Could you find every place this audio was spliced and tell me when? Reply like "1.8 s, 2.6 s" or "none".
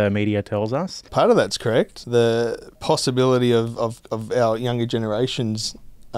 1.0 s, 1.9 s, 2.7 s